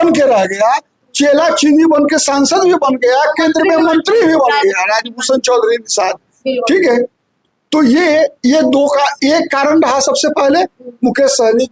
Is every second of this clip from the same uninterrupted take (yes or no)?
yes